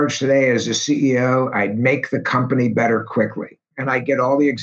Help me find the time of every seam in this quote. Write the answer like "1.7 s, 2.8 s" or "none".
3.7 s